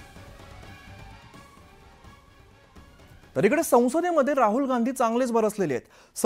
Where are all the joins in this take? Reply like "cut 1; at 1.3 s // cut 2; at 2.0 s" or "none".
cut 1; at 1.2 s